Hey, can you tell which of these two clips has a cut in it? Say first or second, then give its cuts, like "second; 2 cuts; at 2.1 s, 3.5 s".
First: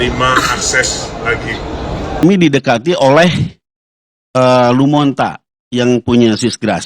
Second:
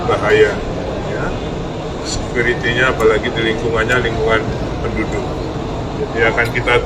first; 1 cut; at 2.2 s